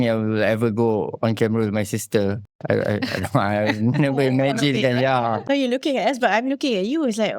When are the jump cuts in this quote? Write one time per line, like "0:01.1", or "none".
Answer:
0:02.5
0:05.4